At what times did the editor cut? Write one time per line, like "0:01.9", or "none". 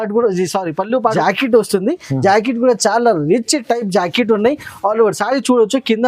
0:01.1